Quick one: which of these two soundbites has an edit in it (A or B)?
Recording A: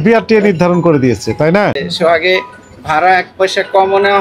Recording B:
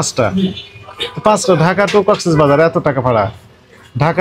A